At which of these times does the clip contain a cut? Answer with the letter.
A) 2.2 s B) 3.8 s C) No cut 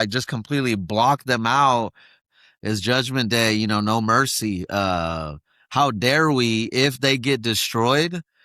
A